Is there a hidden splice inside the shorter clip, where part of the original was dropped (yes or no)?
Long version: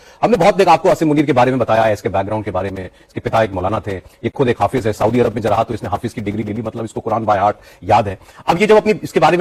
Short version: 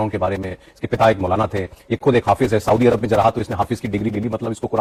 no